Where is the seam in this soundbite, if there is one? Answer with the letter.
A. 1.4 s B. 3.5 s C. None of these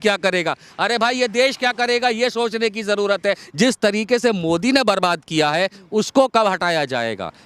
B